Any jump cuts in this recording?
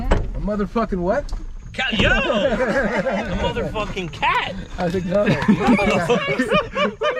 no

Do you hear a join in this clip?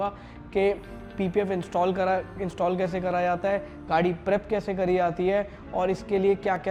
no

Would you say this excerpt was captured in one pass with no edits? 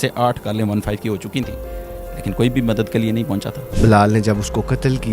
no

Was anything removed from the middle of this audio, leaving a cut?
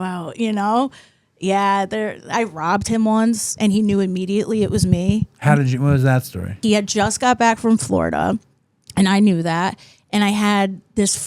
yes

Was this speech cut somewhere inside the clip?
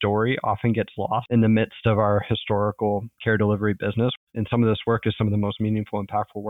yes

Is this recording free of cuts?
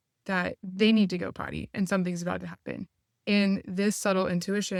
yes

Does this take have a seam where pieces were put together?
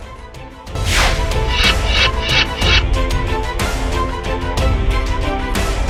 no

